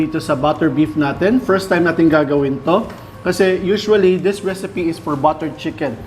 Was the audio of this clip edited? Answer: no; 0 cuts

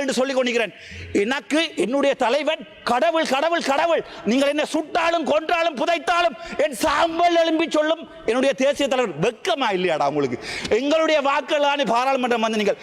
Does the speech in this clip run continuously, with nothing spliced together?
yes; 0 cuts

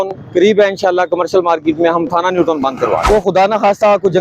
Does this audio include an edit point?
yes; 1 cut; at 3.0 s

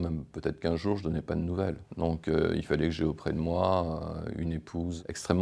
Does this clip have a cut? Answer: no; 0 cuts

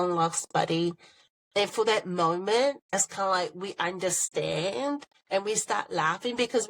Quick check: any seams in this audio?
yes; 2 cuts; at 2.8 s, 5.1 s

